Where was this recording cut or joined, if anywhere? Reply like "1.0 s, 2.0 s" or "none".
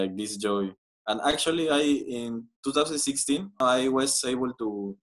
3.6 s